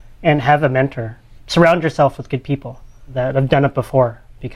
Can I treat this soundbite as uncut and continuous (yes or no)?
no